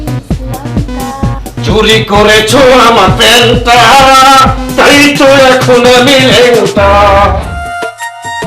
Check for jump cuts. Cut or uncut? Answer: cut